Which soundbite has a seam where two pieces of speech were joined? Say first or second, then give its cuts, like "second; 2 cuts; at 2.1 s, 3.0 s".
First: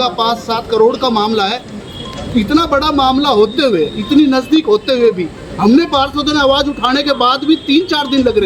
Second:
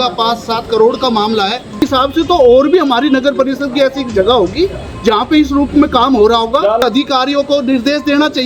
second; 2 cuts; at 1.8 s, 6.8 s